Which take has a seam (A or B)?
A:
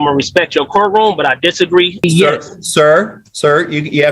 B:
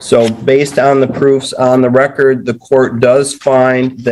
A